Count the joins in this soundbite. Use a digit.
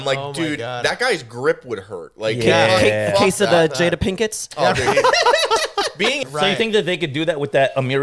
1